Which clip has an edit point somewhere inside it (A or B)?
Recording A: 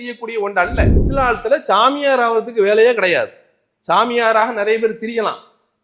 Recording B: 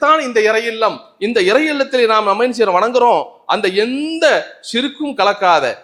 A